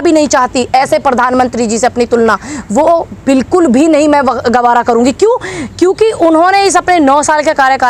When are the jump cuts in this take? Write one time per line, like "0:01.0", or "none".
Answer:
none